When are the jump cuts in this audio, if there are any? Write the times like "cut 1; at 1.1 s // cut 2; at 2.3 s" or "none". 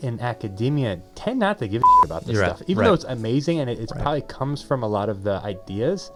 none